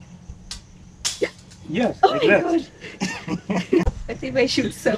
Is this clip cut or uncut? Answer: cut